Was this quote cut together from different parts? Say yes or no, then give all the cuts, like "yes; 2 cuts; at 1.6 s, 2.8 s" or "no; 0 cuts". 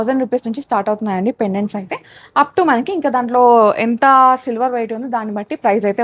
no; 0 cuts